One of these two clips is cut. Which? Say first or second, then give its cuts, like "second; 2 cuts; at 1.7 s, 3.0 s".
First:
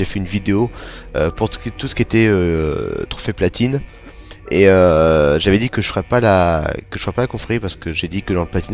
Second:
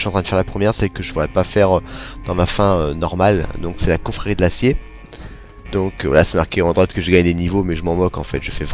second; 1 cut; at 4.0 s